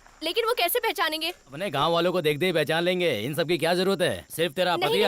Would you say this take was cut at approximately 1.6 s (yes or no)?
yes